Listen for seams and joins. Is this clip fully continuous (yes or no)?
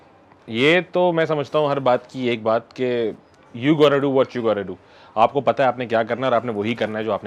yes